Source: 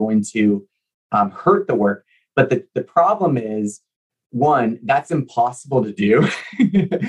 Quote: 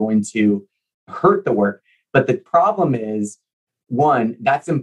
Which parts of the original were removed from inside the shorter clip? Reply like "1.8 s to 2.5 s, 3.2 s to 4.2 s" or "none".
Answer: 1.1 s to 1.3 s, 2.7 s to 2.9 s